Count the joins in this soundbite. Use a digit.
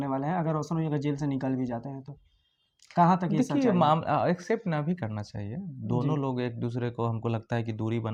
0